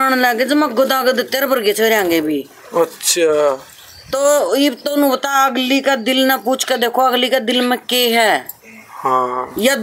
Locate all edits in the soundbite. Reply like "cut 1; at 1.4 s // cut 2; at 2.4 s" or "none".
none